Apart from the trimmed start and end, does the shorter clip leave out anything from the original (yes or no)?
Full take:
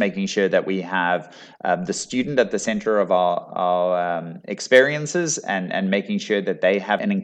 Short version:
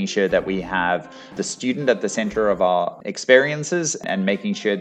yes